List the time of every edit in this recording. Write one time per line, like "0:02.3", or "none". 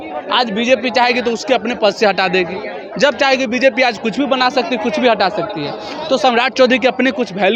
none